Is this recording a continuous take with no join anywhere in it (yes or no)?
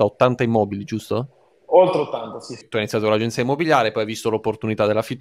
no